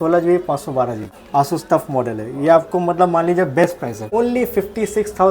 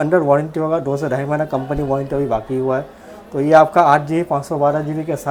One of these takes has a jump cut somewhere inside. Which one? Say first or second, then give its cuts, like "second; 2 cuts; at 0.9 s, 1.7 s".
first; 2 cuts; at 1.1 s, 4.0 s